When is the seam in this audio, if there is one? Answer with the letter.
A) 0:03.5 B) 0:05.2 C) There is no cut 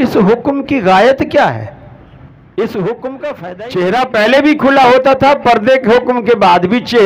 A